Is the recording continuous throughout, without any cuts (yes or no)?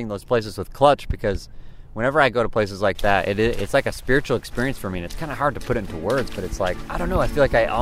no